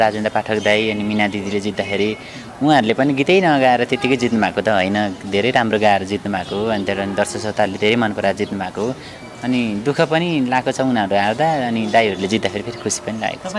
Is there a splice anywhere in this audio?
no; 0 cuts

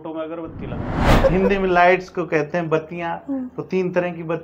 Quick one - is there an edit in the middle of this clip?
yes; 1 cut; at 1.2 s

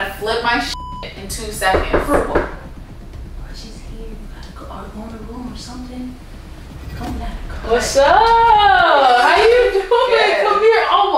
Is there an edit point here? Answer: yes; 1 cut; at 7.4 s

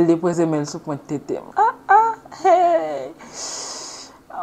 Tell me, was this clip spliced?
yes; 1 cut; at 1.4 s

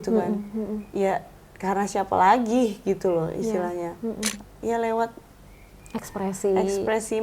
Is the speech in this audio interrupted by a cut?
yes; 1 cut; at 4.5 s

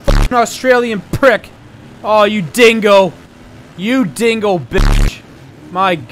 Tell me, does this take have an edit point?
no; 0 cuts

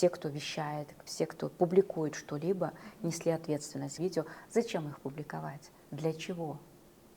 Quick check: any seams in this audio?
yes; 1 cut; at 3.9 s

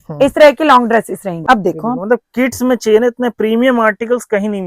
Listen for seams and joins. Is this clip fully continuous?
no; 1 cut; at 1.4 s

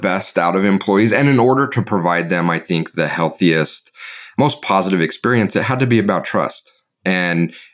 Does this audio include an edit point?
no; 0 cuts

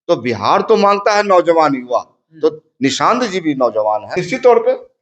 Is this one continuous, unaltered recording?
no; 1 cut; at 4.1 s

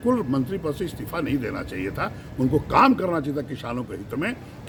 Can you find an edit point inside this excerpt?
no; 0 cuts

